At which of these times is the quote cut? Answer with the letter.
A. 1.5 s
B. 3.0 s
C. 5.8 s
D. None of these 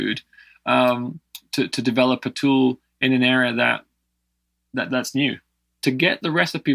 C